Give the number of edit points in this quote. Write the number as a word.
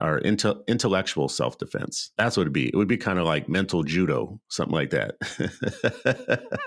one